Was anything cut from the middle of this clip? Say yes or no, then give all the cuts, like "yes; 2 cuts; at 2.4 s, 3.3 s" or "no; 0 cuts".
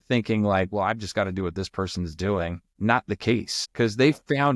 yes; 1 cut; at 2.6 s